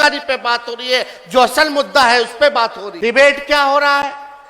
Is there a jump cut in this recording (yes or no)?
yes